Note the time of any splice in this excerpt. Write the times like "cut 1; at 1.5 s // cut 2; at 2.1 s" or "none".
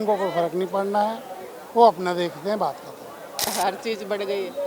cut 1; at 3.5 s